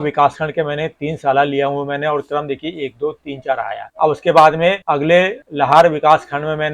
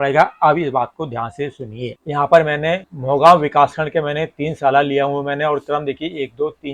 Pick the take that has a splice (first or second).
second